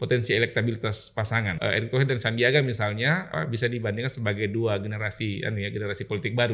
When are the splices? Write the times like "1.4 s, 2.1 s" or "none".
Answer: 1.5 s, 3.3 s